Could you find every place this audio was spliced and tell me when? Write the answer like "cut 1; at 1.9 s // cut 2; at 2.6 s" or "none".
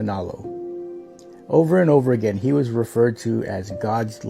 none